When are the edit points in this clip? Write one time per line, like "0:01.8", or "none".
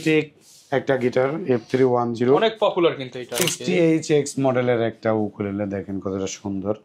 0:03.5